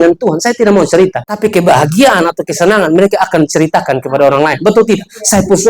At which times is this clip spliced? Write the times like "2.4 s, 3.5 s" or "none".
1.2 s